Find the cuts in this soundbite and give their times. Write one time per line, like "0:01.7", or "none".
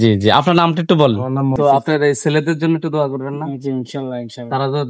0:01.5